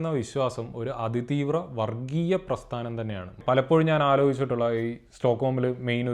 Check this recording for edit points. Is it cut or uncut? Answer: cut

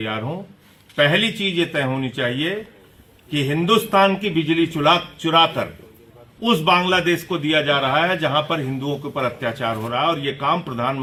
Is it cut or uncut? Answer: uncut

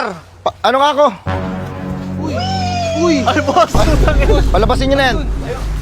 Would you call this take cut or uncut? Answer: uncut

